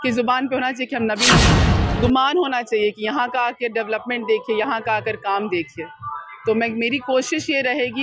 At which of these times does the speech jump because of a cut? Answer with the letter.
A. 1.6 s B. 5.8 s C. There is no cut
A